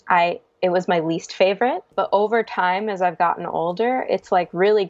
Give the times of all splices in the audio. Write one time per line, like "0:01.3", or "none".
0:01.9